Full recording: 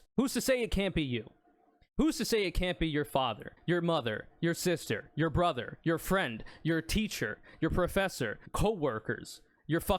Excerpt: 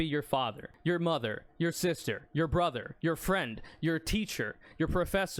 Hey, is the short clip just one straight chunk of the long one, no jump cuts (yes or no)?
yes